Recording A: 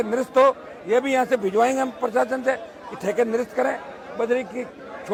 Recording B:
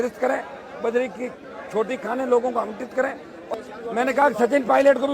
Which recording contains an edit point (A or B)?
B